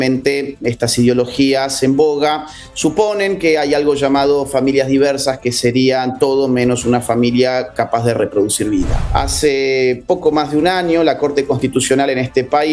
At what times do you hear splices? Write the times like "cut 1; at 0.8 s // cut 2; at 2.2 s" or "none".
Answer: cut 1; at 9.0 s